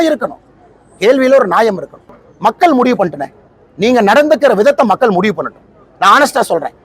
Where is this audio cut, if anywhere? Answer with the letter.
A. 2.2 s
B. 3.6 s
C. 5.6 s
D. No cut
A